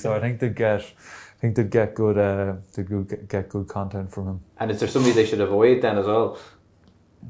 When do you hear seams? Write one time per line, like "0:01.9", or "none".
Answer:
none